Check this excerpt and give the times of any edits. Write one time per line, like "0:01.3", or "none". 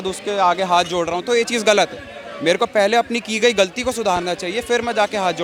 none